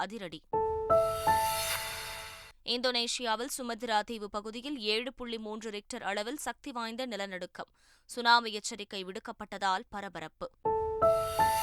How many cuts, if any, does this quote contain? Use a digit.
1